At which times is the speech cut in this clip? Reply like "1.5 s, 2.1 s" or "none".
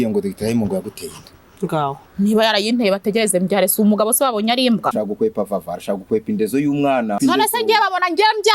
4.9 s, 7.2 s